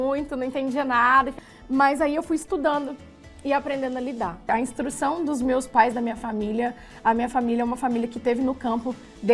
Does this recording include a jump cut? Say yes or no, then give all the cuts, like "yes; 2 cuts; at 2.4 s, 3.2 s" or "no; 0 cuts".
yes; 2 cuts; at 1.4 s, 4.5 s